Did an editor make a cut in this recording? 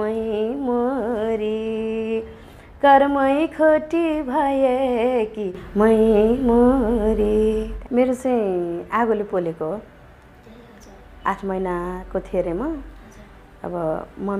yes; 1 cut; at 7.7 s

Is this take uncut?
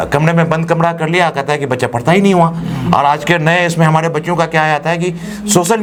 yes; 0 cuts

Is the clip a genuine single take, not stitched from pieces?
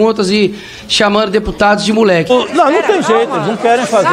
no; 1 cut; at 2.3 s

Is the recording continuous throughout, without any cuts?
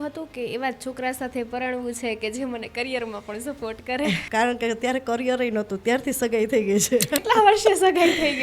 no; 2 cuts; at 4.2 s, 7.2 s

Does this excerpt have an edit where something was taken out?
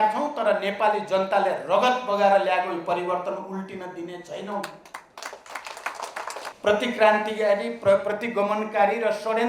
yes; 1 cut; at 6.5 s

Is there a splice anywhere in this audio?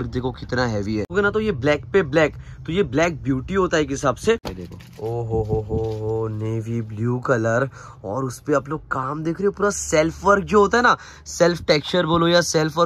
yes; 2 cuts; at 1.1 s, 4.5 s

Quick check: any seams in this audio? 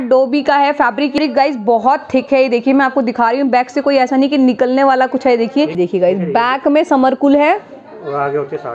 yes; 2 cuts; at 1.2 s, 5.8 s

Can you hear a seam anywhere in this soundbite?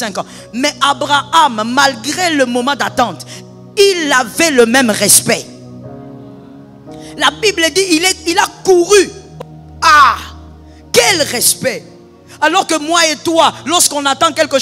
yes; 1 cut; at 9.2 s

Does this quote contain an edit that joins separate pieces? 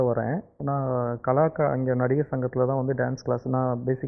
no; 0 cuts

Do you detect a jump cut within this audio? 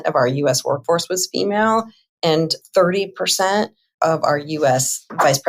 no; 0 cuts

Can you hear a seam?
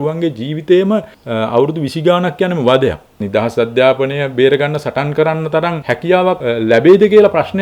yes; 3 cuts; at 1.2 s, 3.2 s, 6.1 s

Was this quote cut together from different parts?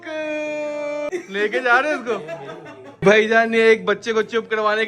yes; 2 cuts; at 1.1 s, 2.9 s

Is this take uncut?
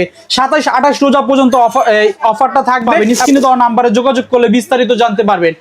no; 1 cut; at 2.9 s

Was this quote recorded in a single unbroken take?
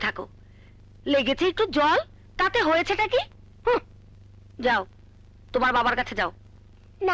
yes; 0 cuts

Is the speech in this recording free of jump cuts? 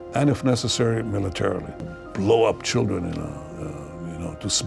no; 1 cut; at 1.9 s

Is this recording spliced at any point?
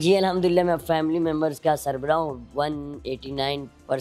no; 0 cuts

